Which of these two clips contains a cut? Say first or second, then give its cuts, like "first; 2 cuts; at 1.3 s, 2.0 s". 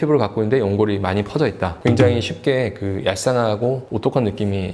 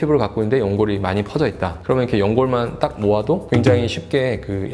first; 1 cut; at 1.8 s